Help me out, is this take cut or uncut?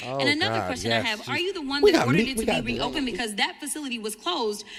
uncut